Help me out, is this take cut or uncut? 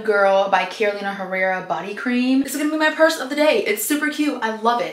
cut